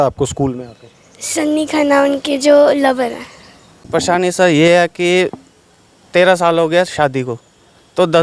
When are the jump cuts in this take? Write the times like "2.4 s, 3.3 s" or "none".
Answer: 3.8 s